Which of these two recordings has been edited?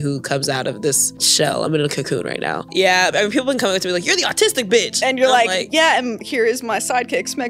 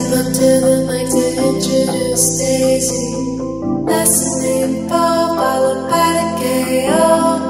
first; 2 cuts; at 1.2 s, 2.6 s

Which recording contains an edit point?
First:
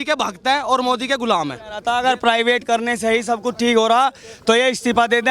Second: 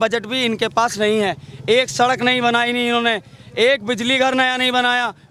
first; 1 cut; at 1.7 s

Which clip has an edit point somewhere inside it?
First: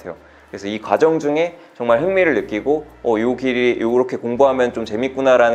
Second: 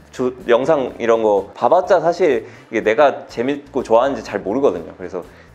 second; 1 cut; at 1.5 s

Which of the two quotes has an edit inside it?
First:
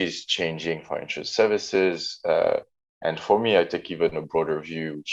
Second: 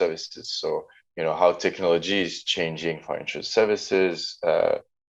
second; 1 cut; at 1.1 s

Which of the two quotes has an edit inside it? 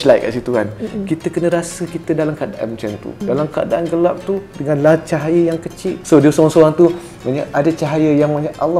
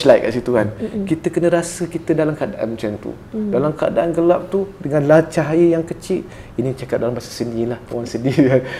first; 2 cuts; at 3.2 s, 5.9 s

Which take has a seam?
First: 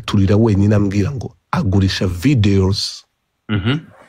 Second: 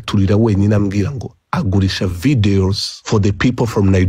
second; 1 cut; at 2.9 s

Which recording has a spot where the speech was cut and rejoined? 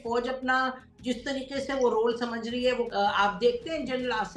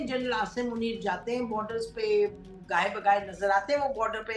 first; 1 cut; at 2.9 s

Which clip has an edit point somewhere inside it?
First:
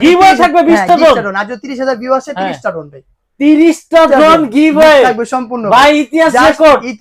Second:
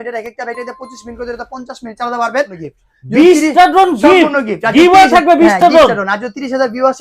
second; 1 cut; at 2.6 s

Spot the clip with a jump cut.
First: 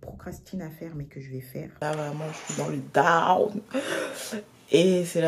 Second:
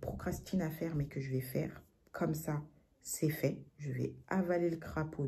first; 1 cut; at 1.8 s

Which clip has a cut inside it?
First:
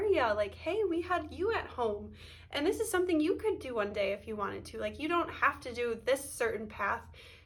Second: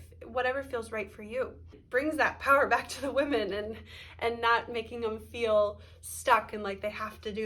second; 1 cut; at 1.8 s

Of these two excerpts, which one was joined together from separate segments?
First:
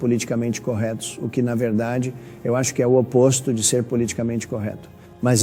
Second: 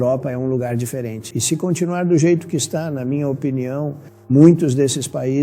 second; 1 cut; at 1.3 s

